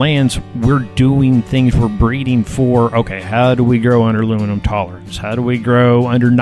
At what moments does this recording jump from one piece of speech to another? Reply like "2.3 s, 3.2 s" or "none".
none